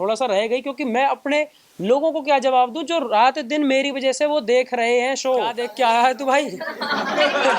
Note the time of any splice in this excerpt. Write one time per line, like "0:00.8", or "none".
0:05.6